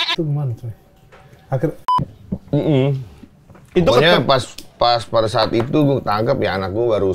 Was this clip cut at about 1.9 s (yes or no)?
yes